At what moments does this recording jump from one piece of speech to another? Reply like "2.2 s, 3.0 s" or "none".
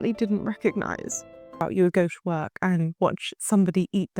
1.6 s

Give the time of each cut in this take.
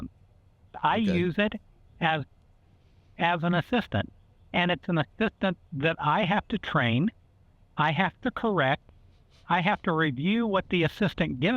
none

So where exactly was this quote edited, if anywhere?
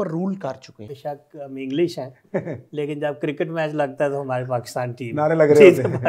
0.9 s

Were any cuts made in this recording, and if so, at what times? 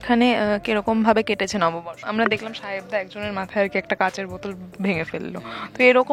1.9 s

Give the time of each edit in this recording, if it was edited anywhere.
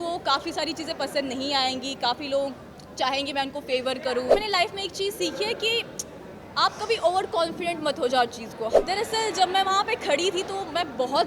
4.3 s, 8.8 s

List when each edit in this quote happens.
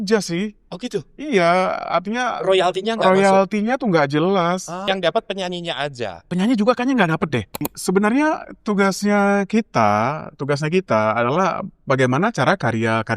4.8 s, 6.2 s, 7.7 s

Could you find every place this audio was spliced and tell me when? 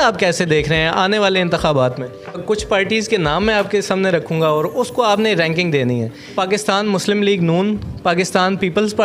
2.4 s, 6.3 s

